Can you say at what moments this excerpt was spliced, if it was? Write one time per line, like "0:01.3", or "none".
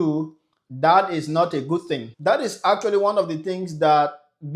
0:02.1